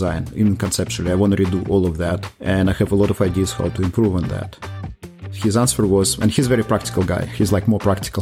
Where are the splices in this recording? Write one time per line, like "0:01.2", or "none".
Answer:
none